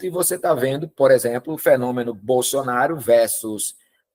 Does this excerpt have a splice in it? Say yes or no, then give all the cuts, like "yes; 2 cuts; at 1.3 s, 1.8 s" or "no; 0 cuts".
no; 0 cuts